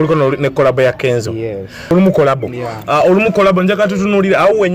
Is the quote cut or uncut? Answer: cut